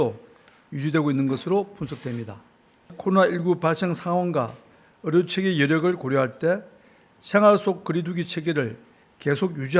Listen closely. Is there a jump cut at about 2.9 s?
yes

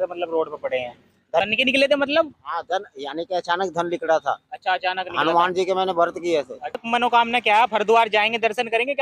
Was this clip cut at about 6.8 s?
yes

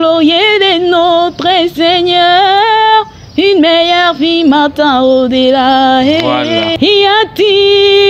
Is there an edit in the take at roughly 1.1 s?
no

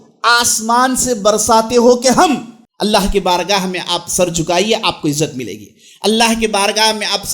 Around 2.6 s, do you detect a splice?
yes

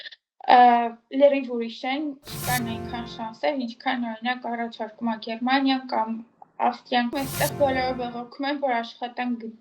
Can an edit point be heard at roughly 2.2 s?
yes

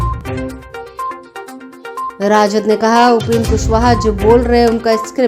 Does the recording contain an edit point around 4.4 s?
no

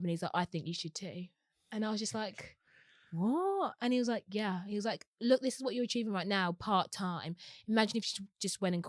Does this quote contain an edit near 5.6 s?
no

